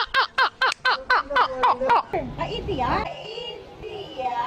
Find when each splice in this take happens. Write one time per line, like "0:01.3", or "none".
0:02.1